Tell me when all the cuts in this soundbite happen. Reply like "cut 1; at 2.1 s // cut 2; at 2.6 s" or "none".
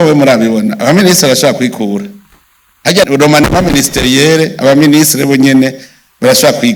none